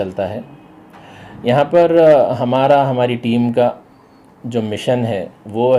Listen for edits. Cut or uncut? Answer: uncut